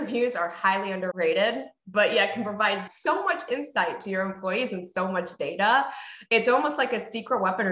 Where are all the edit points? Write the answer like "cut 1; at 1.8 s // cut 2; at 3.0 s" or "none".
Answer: cut 1; at 1.1 s // cut 2; at 2.9 s